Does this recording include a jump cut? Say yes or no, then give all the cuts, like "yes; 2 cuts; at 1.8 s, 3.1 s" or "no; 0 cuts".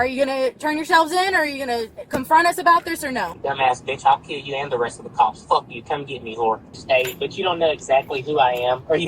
yes; 2 cuts; at 3.3 s, 6.7 s